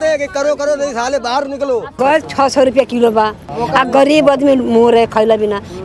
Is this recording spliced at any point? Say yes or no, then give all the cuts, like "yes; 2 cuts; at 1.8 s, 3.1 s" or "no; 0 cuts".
yes; 2 cuts; at 2.0 s, 3.4 s